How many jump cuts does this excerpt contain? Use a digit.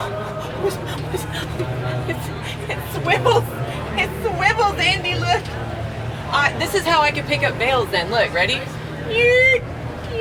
0